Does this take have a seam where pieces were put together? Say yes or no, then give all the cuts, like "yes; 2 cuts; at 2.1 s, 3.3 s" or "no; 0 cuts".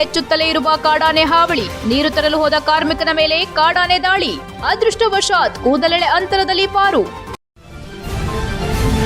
yes; 1 cut; at 7.3 s